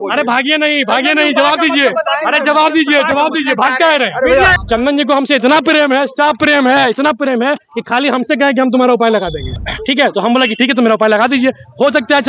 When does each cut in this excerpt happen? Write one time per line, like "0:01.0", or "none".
0:04.6
0:09.6